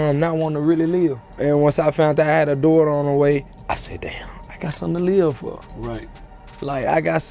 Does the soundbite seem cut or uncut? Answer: cut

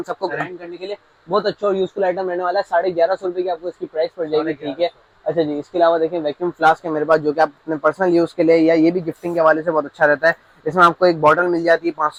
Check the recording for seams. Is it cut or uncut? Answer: uncut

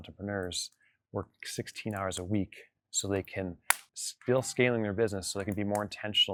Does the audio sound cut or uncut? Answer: uncut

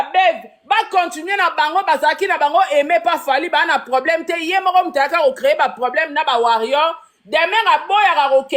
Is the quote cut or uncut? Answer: uncut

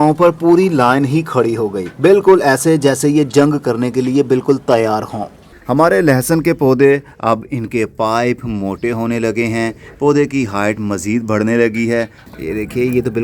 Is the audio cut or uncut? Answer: cut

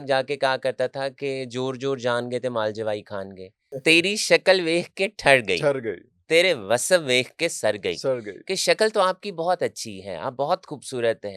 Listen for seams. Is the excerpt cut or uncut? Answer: cut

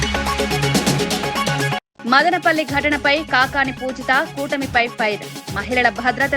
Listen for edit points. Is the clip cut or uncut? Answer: cut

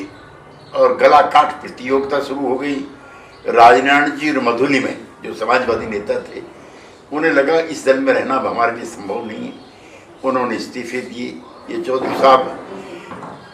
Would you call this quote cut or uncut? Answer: uncut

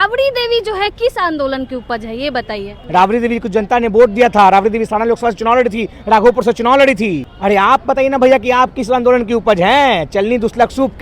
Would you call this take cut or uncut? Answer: cut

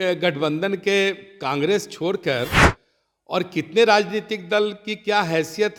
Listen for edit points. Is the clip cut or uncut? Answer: uncut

